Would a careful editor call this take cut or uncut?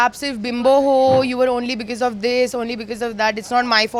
uncut